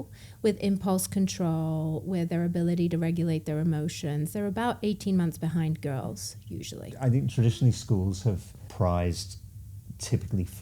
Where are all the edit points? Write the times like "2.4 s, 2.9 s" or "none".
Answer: 6.9 s, 8.6 s